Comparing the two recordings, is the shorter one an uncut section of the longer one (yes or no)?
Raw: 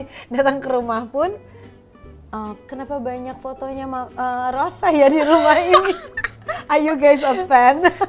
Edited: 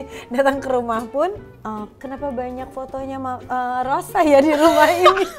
no